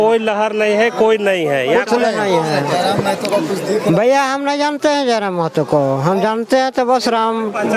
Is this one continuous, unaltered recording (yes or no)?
yes